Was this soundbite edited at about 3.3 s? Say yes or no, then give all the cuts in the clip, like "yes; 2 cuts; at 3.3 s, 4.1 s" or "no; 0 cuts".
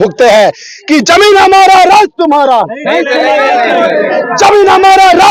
no; 0 cuts